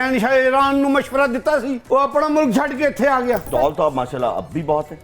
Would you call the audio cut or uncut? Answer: cut